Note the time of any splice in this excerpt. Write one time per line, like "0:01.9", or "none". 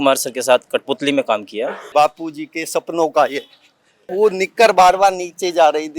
0:01.8
0:04.1